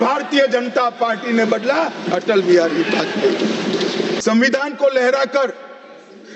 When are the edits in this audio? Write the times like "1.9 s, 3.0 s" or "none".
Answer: 4.2 s